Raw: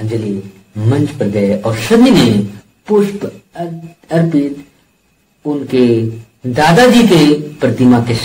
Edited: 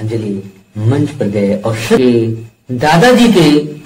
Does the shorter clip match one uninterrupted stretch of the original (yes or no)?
no